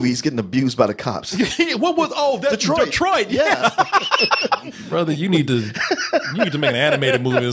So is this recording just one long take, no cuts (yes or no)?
no